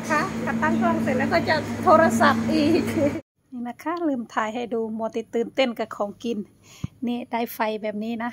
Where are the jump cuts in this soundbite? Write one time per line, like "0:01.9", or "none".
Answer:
0:03.2